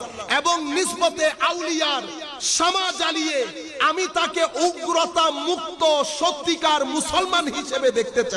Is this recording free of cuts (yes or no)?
yes